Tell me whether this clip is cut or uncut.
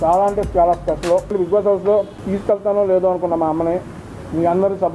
cut